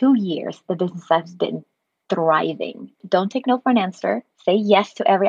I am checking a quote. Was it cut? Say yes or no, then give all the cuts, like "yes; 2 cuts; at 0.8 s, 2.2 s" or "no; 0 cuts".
yes; 1 cut; at 3.0 s